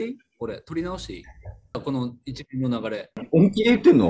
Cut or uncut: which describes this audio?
cut